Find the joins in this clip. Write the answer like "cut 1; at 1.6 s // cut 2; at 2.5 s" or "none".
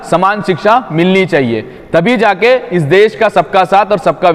none